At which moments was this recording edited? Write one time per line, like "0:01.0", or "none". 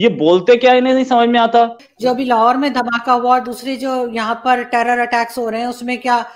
0:01.8